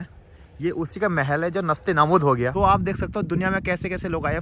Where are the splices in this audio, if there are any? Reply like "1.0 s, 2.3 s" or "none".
2.5 s